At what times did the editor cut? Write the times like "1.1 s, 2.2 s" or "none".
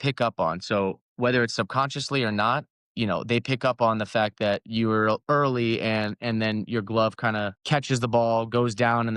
2.8 s, 7.6 s